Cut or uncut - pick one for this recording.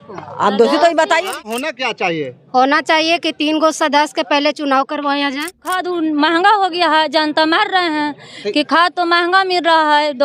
cut